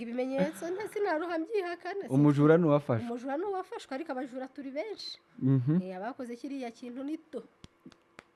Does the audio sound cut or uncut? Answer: uncut